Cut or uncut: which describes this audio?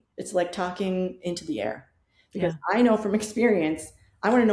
uncut